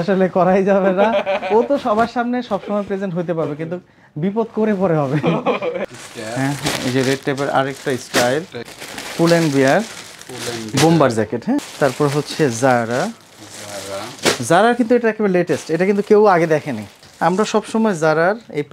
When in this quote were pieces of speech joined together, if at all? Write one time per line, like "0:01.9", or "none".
0:05.8
0:17.0